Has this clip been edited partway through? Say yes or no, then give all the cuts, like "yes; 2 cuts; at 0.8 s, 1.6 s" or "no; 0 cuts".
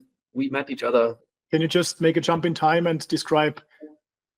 yes; 1 cut; at 1.2 s